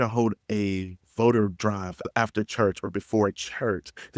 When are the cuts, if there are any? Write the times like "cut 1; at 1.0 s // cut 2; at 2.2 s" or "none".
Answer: cut 1; at 2.0 s